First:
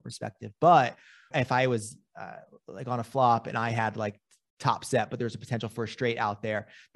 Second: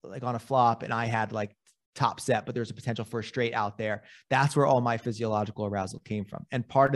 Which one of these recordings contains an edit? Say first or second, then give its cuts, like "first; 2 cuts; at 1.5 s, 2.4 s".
first; 1 cut; at 1.3 s